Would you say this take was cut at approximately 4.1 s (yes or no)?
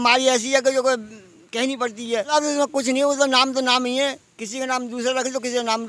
no